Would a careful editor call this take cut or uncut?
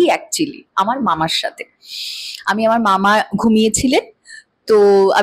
uncut